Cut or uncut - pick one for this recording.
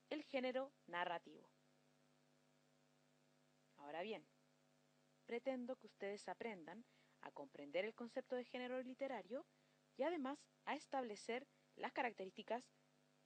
cut